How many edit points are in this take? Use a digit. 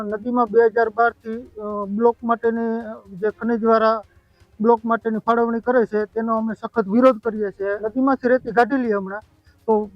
1